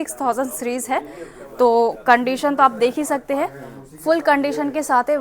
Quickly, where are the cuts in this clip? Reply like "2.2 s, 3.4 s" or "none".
none

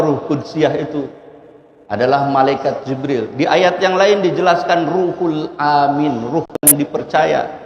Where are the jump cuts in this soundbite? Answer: 6.7 s

